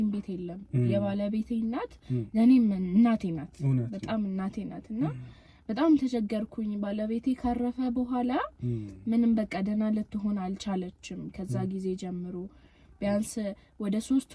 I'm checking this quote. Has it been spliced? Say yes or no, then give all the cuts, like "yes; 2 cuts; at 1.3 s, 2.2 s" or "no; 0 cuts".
no; 0 cuts